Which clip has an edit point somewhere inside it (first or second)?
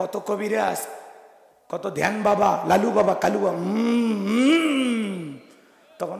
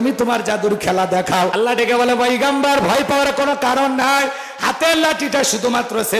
second